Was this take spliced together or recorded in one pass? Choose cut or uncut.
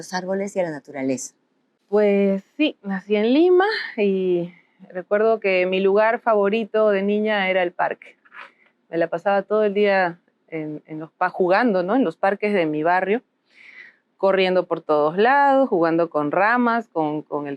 uncut